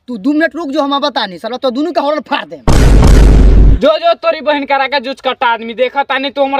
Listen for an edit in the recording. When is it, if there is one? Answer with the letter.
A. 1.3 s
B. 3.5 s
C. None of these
C